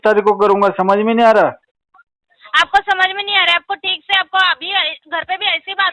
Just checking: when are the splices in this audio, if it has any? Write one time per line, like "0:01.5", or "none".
none